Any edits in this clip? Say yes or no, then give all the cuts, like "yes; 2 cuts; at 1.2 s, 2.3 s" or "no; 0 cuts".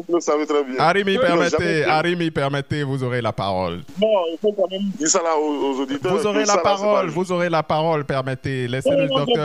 no; 0 cuts